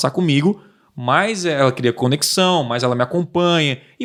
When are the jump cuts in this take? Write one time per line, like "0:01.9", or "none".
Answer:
none